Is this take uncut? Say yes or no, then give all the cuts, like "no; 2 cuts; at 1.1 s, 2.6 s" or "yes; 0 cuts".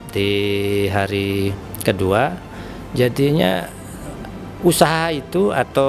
yes; 0 cuts